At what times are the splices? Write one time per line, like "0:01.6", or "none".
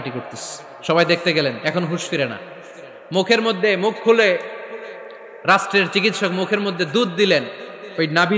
none